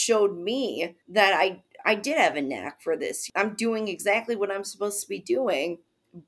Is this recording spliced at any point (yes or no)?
yes